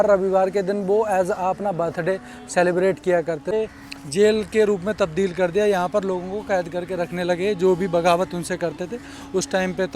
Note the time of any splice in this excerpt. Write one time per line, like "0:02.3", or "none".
0:03.5